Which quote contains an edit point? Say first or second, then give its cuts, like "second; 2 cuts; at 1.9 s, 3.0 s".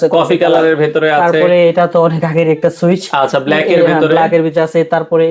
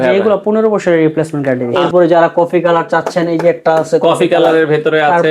second; 1 cut; at 1.7 s